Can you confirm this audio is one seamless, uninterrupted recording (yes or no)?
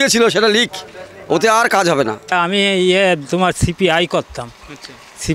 no